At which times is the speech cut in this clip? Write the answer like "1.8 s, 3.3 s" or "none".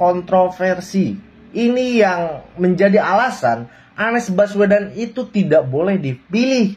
none